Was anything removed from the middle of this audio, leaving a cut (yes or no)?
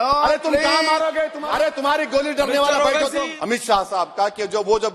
yes